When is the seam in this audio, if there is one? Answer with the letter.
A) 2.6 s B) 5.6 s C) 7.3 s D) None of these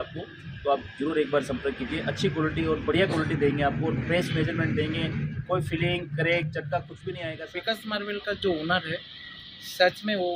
C